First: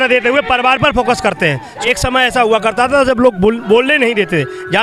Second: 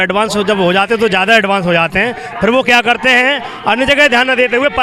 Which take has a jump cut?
first; 1 cut; at 1.7 s

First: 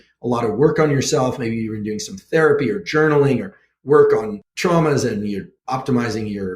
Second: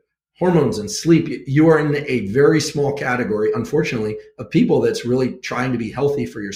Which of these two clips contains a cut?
first; 2 cuts; at 4.4 s, 5.5 s

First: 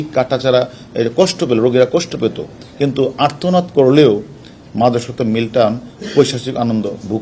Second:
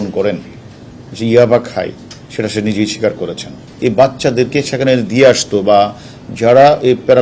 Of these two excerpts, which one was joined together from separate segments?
second; 1 cut; at 3.6 s

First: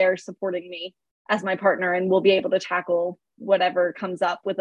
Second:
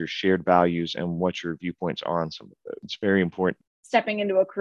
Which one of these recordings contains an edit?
second; 2 cuts; at 2.9 s, 3.7 s

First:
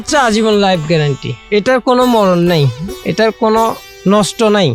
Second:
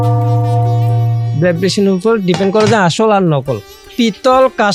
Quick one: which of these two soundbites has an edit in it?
second; 1 cut; at 3.6 s

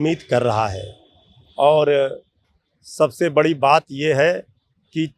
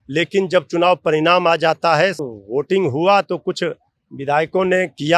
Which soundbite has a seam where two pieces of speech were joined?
second; 1 cut; at 2.2 s

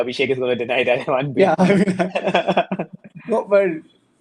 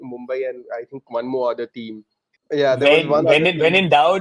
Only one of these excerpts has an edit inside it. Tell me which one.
second; 1 cut; at 2.4 s

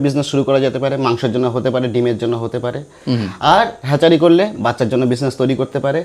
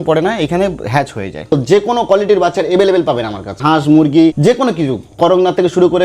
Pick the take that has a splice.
second; 3 cuts; at 1.5 s, 3.6 s, 4.4 s

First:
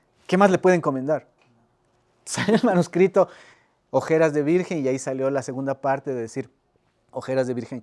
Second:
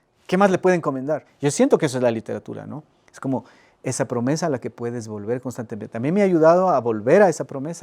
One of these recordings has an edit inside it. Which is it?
second; 1 cut; at 1.3 s

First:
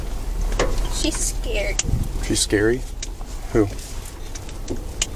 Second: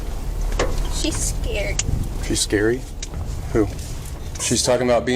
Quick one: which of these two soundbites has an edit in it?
second; 1 cut; at 4.3 s

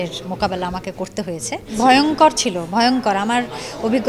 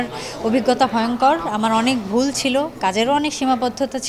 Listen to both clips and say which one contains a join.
first; 1 cut; at 1.7 s

